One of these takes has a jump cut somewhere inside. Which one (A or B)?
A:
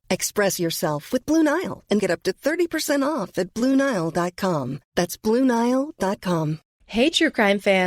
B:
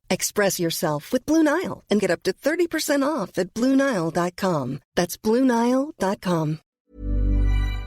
B